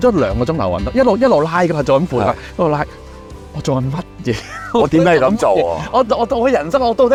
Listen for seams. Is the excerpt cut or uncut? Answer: uncut